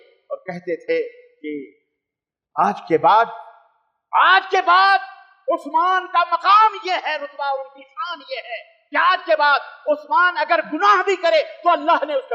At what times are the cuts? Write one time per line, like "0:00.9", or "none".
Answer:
none